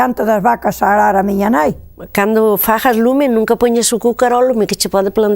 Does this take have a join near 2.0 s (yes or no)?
yes